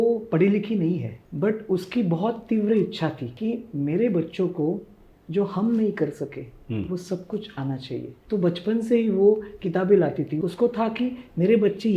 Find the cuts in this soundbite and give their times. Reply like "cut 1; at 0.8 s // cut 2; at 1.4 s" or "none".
cut 1; at 1.2 s // cut 2; at 3.3 s // cut 3; at 8.2 s // cut 4; at 10.3 s